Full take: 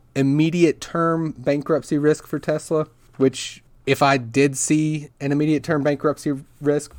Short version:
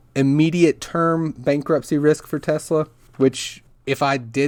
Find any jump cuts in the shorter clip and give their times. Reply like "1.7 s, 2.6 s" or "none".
none